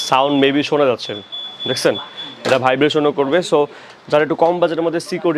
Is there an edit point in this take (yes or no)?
no